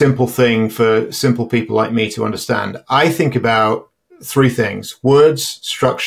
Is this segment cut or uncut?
uncut